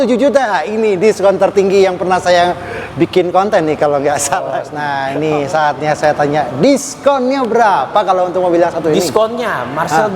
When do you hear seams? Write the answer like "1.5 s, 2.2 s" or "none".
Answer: 4.7 s